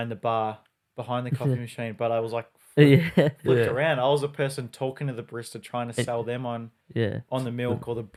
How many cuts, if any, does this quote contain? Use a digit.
0